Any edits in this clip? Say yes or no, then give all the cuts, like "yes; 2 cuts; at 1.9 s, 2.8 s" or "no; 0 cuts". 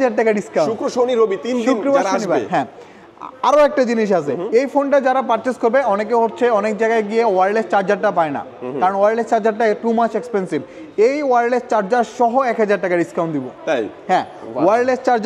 no; 0 cuts